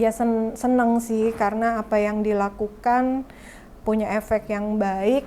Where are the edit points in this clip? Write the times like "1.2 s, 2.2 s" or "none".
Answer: none

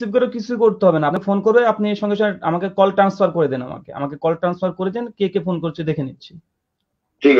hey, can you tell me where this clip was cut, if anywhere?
1.2 s

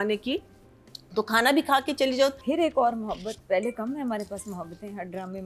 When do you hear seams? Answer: 2.4 s

